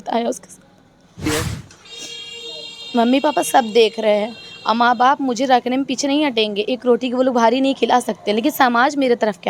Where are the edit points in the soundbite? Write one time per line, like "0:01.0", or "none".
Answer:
0:01.3